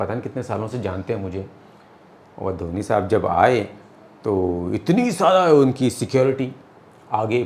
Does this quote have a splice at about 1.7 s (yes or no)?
no